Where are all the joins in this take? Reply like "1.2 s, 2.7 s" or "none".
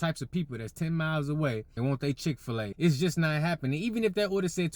1.7 s, 2.7 s